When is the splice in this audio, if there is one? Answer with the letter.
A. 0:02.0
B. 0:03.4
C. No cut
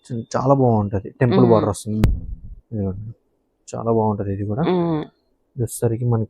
A